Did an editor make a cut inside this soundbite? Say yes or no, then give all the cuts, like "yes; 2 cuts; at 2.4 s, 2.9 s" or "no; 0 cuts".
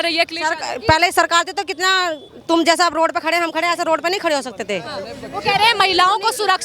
no; 0 cuts